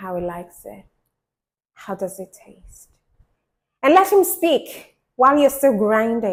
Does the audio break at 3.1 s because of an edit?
no; 0 cuts

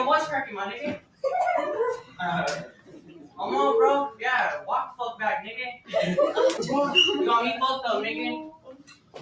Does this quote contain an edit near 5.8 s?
yes; 1 cut; at 5.8 s

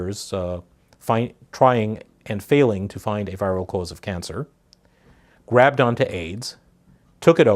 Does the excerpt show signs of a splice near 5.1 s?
no; 1 cut; at 1.8 s

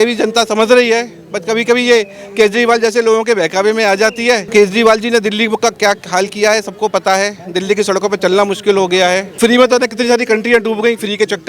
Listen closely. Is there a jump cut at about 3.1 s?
no; 2 cuts; at 4.4 s, 9.4 s

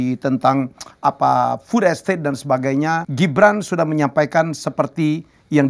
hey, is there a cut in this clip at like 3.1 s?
yes; 1 cut; at 3.1 s

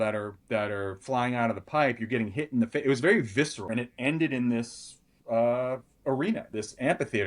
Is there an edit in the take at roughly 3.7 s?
yes; 1 cut; at 3.7 s

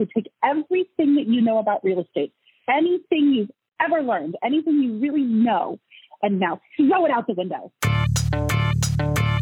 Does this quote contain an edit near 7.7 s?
yes; 1 cut; at 7.7 s

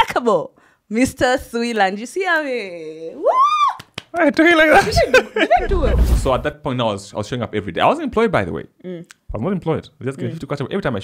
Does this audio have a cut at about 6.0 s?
yes; 1 cut; at 6.0 s

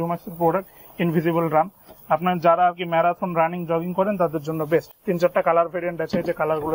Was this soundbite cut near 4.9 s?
no; 0 cuts

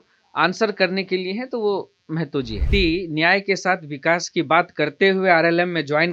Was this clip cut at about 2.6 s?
yes; 1 cut; at 2.6 s

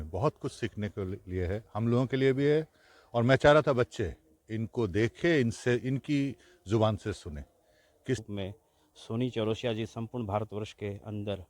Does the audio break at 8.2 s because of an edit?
yes; 1 cut; at 8.2 s

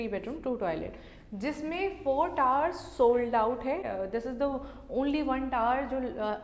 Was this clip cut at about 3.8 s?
yes; 1 cut; at 3.8 s

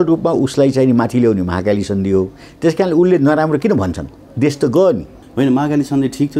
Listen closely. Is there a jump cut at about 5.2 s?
yes; 1 cut; at 5.2 s

